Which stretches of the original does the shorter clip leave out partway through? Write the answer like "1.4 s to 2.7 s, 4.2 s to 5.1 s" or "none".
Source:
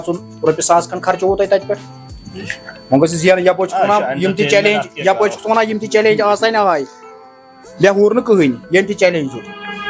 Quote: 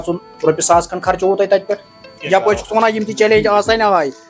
2.2 s to 4.9 s